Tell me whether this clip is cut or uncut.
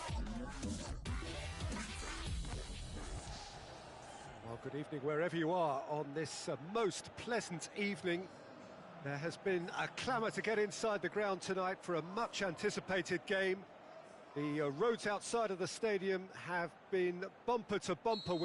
cut